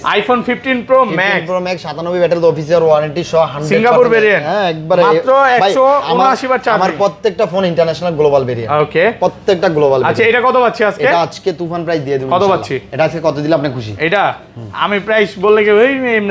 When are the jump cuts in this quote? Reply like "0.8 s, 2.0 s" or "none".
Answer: none